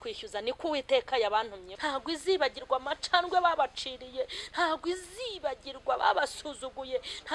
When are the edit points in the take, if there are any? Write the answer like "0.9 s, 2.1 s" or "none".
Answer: 1.7 s